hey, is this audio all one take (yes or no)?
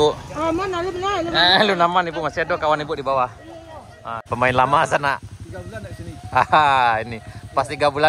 no